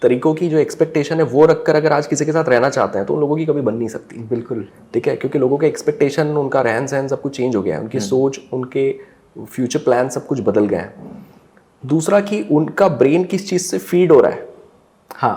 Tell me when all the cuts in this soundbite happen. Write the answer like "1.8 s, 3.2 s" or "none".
none